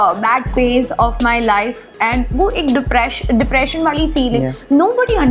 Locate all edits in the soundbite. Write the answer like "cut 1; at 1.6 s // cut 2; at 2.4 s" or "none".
none